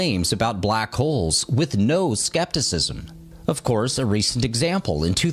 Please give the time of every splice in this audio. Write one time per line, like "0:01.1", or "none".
none